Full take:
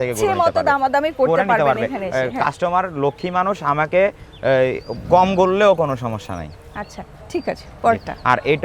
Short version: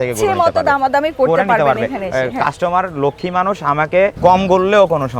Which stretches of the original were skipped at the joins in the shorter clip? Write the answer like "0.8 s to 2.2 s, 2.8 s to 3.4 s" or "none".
4.1 s to 5.0 s

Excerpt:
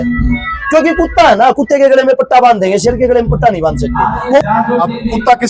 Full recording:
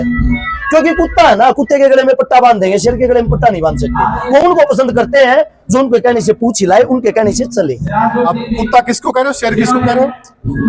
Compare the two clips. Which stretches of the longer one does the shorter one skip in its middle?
4.4 s to 7.9 s

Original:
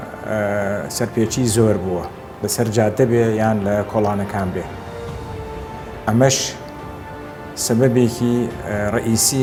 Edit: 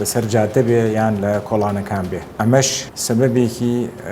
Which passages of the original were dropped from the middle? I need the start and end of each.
4.7 s to 5.9 s, 6.5 s to 7.5 s

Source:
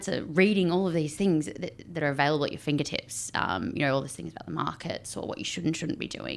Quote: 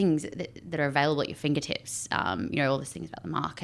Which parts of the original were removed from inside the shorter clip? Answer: none

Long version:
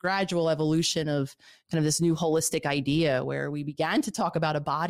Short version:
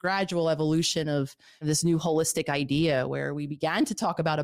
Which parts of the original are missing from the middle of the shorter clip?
1.5 s to 1.6 s

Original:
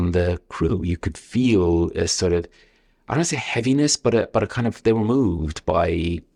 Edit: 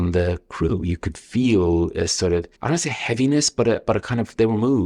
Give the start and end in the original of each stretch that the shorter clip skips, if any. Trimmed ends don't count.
2.5 s to 3.0 s

